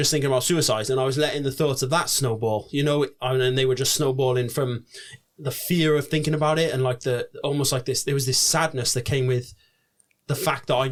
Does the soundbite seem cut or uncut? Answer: uncut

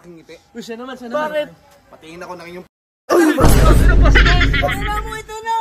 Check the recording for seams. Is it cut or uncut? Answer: uncut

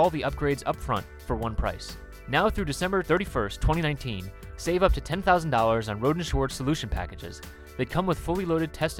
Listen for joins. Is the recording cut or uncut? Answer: cut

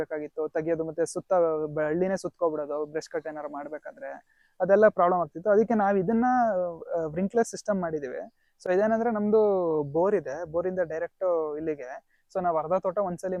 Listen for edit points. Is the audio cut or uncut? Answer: uncut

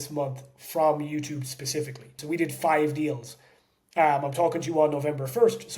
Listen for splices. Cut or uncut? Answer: cut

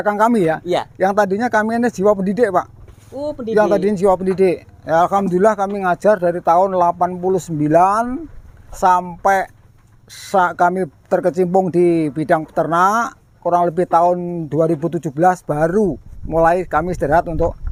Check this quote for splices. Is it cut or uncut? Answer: uncut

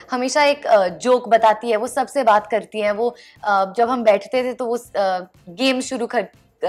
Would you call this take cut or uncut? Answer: uncut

